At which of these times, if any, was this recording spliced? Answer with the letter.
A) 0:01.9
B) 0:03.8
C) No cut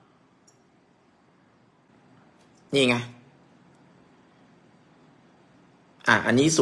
A